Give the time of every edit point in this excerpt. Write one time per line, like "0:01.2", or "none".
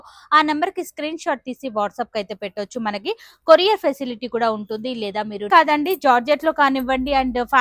0:05.5